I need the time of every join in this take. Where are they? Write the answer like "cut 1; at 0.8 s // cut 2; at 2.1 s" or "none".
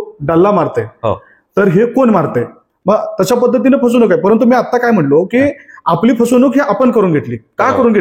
cut 1; at 2.6 s